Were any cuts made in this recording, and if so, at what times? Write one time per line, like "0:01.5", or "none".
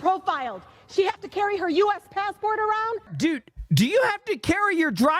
0:03.1